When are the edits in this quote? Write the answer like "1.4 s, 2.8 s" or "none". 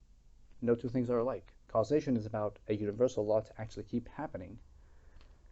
1.5 s